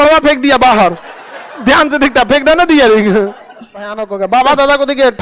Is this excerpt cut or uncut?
cut